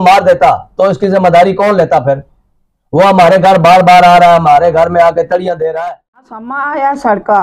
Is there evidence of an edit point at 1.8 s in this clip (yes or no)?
no